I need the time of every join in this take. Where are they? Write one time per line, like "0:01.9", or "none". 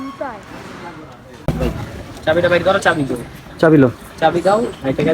0:01.4

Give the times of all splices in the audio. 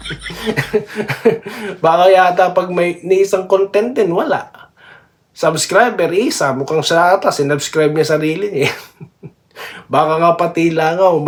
none

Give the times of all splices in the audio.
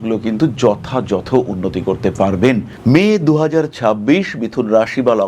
0:02.7

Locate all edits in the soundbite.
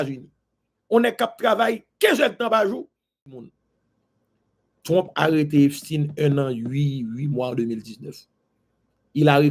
0:03.4

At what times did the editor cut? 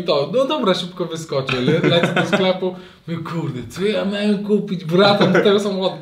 none

